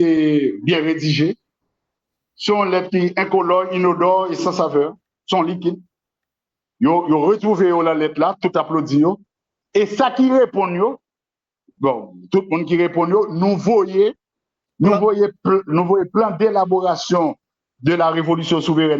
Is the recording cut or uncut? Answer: uncut